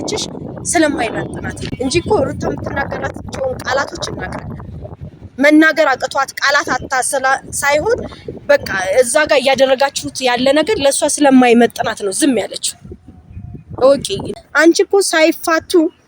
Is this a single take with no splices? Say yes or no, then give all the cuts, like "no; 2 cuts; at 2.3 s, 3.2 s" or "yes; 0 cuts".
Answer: no; 2 cuts; at 1.6 s, 14.2 s